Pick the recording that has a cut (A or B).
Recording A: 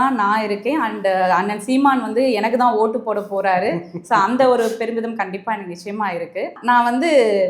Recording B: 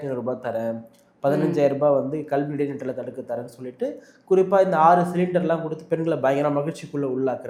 A